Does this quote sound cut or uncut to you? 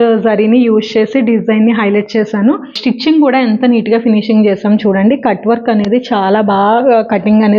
cut